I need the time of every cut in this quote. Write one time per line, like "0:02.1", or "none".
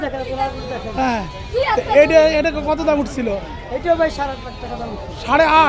none